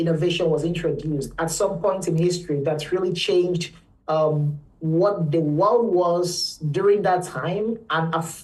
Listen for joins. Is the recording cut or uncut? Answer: uncut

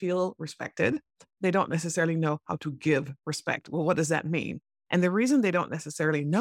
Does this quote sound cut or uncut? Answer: uncut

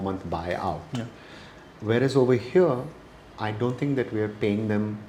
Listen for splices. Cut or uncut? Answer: uncut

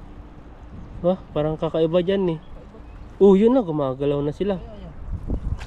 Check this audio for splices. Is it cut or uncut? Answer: uncut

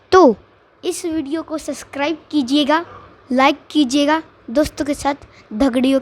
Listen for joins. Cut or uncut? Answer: uncut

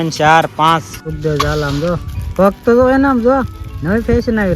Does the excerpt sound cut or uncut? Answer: cut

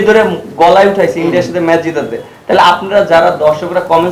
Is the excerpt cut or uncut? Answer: uncut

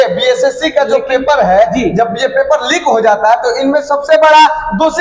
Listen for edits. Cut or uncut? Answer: uncut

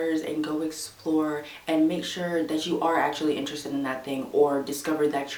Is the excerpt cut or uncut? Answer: uncut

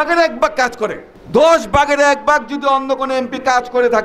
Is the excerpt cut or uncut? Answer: cut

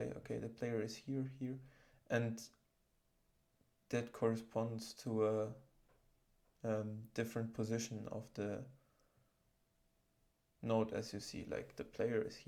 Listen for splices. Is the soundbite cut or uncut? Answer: uncut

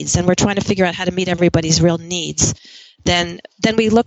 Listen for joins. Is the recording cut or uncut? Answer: uncut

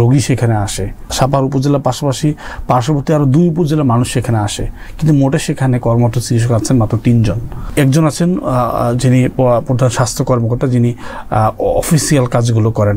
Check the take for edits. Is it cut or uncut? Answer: cut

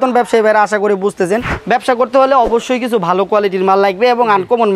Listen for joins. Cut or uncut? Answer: cut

